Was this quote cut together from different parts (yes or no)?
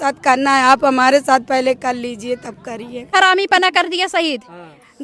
yes